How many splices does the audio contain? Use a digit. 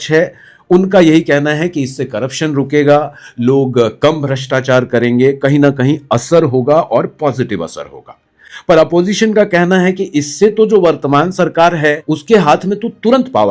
0